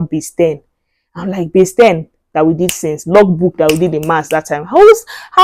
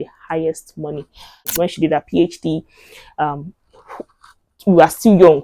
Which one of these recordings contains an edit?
second; 1 cut; at 1.4 s

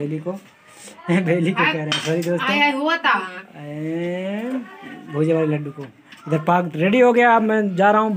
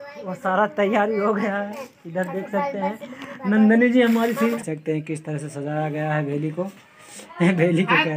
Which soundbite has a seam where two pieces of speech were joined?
second; 1 cut; at 4.6 s

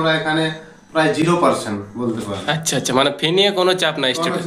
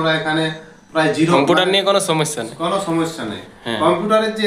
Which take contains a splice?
second; 1 cut; at 1.3 s

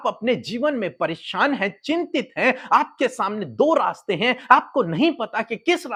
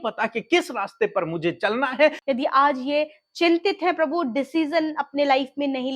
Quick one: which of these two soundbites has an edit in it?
second; 1 cut; at 2.2 s

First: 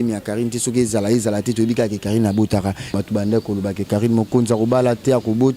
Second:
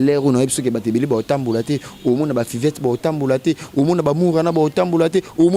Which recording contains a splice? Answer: first; 1 cut; at 2.9 s

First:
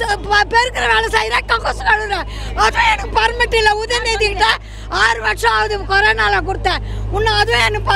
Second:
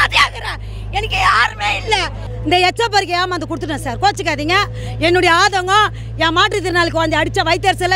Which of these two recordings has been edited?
second; 1 cut; at 2.3 s

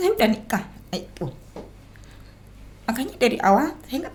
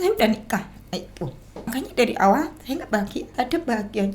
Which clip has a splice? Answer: second; 2 cuts; at 1.7 s, 3.3 s

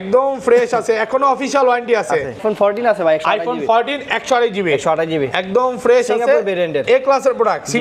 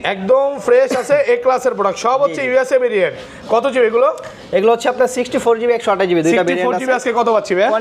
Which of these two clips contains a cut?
first; 1 cut; at 2.4 s

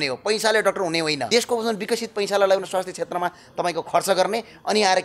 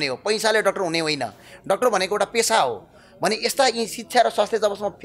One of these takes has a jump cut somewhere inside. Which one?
first; 1 cut; at 1.2 s

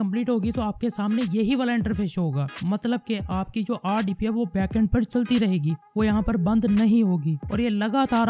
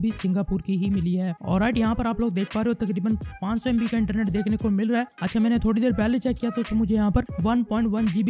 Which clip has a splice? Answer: second; 1 cut; at 1.4 s

